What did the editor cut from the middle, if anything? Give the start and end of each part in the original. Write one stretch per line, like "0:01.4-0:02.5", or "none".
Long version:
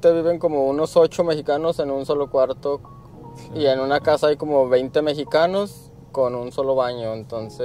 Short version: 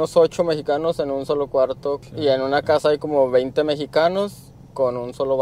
0:02.9-0:03.5